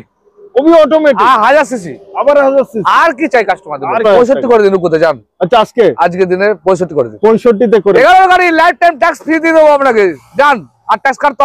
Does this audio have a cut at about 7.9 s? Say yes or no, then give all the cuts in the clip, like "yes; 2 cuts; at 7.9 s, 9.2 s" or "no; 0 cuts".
yes; 2 cuts; at 4.0 s, 7.9 s